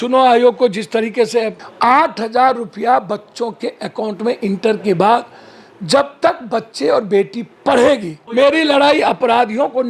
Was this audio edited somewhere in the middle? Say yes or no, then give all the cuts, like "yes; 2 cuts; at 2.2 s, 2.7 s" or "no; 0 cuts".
yes; 2 cuts; at 1.6 s, 8.2 s